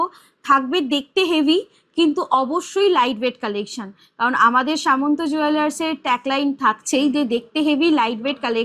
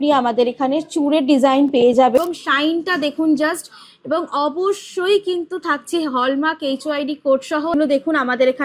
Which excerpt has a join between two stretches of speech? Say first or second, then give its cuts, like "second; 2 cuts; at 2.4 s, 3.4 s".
second; 2 cuts; at 2.2 s, 7.7 s